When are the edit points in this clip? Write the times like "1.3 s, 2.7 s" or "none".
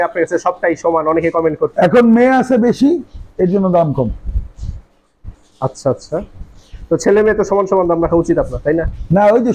none